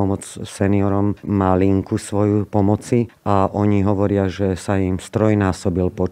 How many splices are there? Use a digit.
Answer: 2